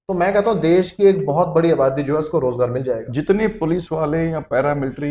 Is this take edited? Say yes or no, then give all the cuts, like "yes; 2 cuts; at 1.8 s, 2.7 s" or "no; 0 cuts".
yes; 1 cut; at 3.1 s